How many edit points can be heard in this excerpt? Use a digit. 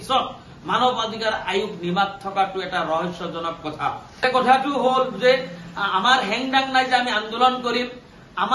1